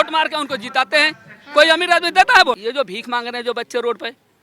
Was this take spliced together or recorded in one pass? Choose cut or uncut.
cut